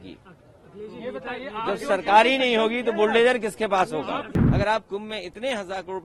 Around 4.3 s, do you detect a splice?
yes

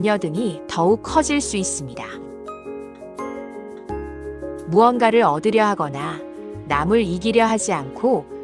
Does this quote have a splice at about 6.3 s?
no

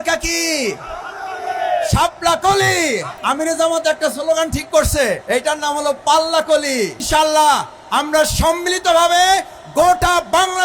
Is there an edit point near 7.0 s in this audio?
yes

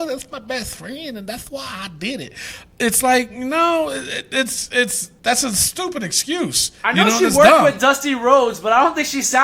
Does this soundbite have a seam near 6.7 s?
yes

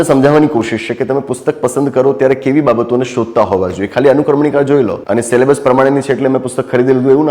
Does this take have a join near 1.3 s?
no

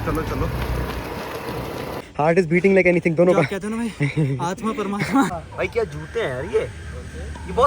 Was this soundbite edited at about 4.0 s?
no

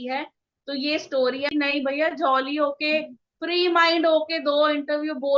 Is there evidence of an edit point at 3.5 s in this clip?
no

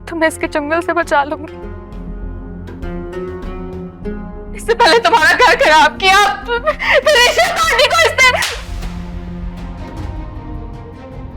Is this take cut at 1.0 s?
no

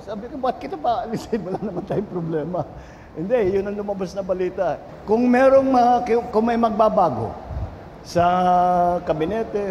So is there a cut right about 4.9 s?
yes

